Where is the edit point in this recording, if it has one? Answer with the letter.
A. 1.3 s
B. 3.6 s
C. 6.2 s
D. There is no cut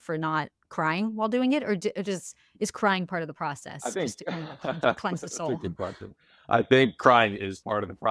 D